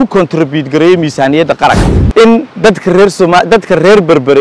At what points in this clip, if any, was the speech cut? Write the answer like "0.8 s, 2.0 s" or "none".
2.0 s

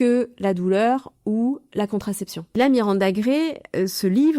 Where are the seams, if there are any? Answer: 2.6 s

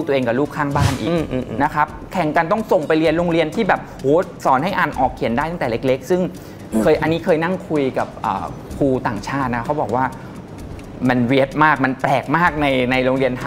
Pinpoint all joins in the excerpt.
none

